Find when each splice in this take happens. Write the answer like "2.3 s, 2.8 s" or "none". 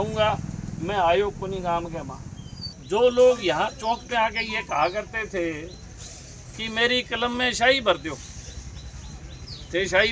2.7 s